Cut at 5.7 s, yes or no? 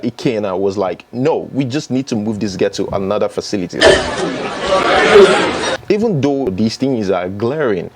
yes